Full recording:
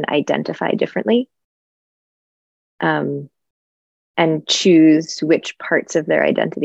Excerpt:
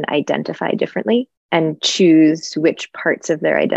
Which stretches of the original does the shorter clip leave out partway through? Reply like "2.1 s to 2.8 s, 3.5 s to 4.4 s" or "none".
1.4 s to 4.0 s